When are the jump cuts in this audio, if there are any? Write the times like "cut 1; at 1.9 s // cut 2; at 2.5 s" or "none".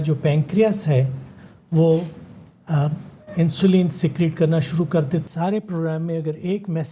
cut 1; at 5.2 s